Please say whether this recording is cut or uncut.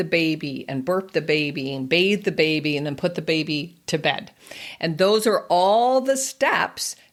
uncut